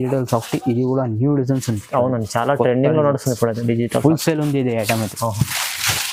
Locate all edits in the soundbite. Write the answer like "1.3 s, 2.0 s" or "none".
none